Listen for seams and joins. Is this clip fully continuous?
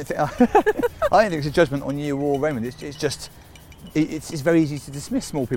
yes; 0 cuts

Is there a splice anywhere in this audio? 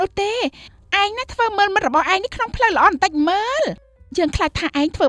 yes; 1 cut; at 3.9 s

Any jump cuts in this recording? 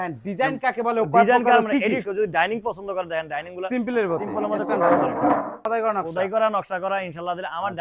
yes; 2 cuts; at 2.0 s, 5.6 s

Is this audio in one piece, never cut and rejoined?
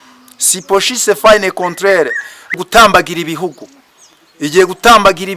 no; 1 cut; at 2.6 s

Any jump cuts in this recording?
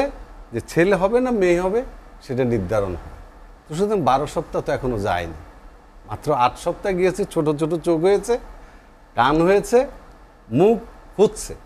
no; 0 cuts

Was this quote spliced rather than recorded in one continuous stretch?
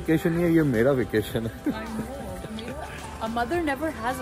no; 0 cuts

